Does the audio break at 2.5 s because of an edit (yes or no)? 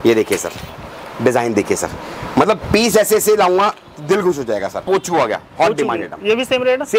no